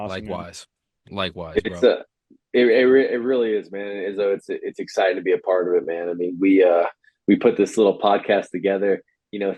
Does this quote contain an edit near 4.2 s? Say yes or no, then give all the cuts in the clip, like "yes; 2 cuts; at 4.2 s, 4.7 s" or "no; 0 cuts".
no; 0 cuts